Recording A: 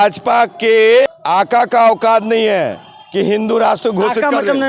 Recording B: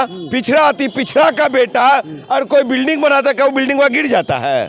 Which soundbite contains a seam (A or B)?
A